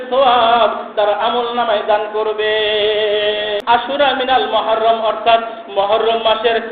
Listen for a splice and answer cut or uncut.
cut